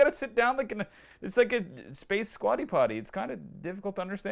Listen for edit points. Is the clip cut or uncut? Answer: uncut